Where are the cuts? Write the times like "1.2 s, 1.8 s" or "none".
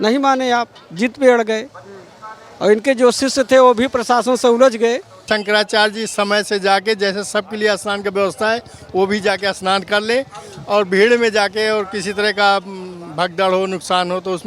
5.2 s